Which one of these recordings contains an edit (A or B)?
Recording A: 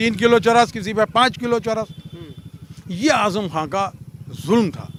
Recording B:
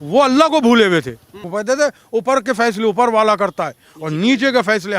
B